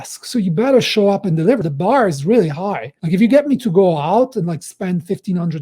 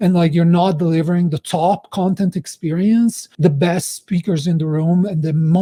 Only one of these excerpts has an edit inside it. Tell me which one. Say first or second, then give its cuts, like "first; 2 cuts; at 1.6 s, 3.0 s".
first; 1 cut; at 1.7 s